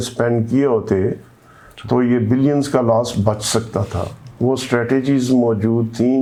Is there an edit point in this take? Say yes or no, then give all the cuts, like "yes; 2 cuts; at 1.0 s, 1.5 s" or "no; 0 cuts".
no; 0 cuts